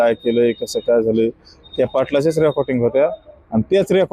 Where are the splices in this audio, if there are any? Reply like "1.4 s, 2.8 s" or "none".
none